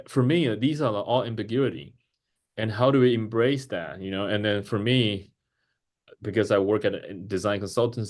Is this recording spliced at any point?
no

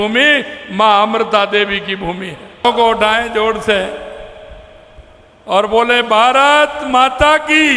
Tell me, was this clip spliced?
yes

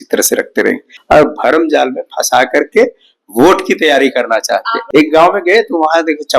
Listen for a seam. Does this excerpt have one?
yes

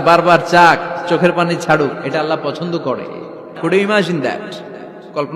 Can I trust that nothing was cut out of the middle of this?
no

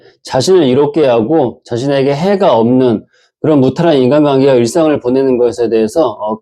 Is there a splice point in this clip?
no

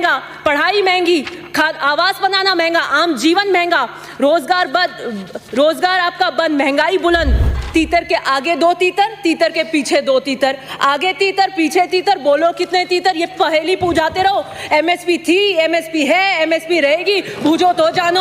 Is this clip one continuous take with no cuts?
no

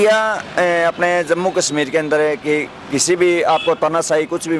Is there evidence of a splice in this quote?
no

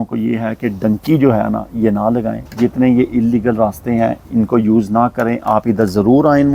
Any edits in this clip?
no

